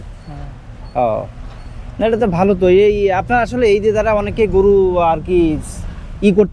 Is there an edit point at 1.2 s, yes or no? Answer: no